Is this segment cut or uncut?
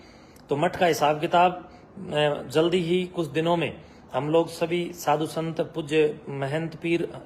uncut